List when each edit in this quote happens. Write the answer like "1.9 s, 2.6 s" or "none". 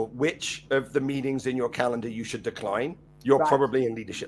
3.1 s